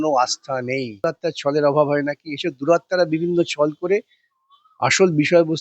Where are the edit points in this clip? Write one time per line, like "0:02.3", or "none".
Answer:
0:01.0